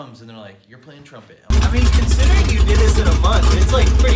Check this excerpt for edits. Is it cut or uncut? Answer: cut